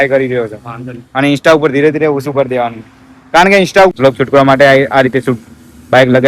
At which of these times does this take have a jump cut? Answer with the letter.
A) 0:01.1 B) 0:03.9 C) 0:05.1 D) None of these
B